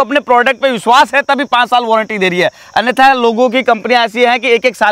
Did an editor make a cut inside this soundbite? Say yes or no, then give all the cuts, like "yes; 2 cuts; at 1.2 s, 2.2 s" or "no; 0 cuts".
no; 0 cuts